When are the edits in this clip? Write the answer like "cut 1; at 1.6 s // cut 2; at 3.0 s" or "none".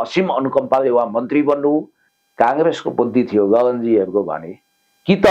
cut 1; at 2.0 s